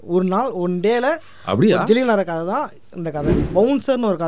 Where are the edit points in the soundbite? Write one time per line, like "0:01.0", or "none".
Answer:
0:03.4